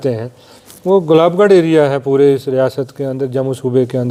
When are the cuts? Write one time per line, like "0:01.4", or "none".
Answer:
none